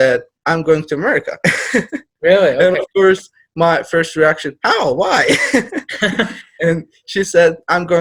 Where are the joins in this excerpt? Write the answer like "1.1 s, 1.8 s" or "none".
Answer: none